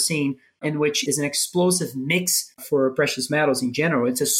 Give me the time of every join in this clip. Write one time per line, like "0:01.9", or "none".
0:00.9
0:02.6